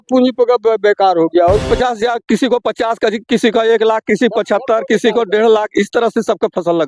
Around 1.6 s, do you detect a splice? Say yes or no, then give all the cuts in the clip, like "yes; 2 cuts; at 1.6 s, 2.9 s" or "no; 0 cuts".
yes; 1 cut; at 1.6 s